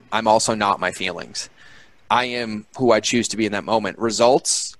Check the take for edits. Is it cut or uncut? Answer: uncut